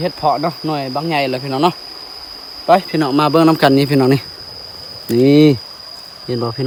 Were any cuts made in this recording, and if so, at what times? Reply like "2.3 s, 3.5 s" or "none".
none